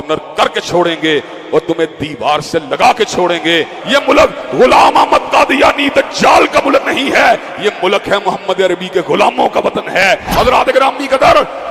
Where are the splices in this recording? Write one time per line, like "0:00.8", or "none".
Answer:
0:03.8
0:10.1